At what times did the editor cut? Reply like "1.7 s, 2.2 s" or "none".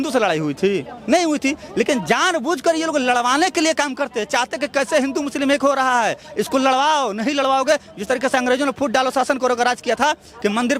none